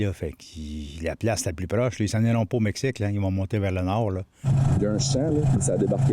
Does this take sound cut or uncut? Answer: cut